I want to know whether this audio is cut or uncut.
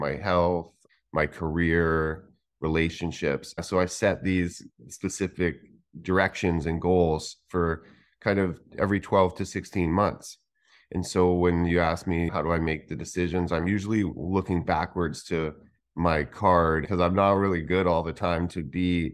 cut